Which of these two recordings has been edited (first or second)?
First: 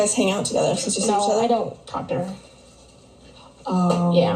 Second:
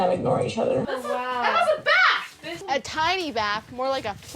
second